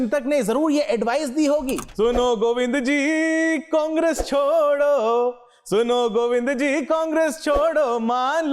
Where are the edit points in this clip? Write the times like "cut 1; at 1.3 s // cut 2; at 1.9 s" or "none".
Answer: cut 1; at 1.8 s